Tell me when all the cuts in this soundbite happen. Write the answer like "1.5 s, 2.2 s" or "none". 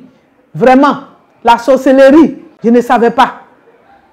2.5 s